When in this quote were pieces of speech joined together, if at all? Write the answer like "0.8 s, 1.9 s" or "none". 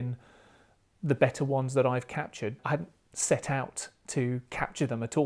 2.6 s